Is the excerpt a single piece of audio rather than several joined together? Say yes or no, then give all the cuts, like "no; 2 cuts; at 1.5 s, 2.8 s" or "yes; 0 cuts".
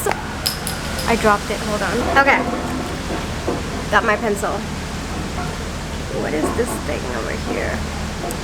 no; 1 cut; at 2.0 s